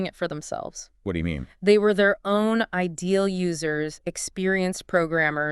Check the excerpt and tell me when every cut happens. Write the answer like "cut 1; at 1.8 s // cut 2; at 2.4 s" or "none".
none